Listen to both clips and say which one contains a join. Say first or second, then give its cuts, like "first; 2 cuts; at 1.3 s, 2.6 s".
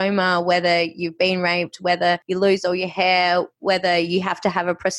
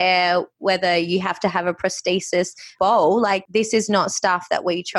second; 1 cut; at 3.4 s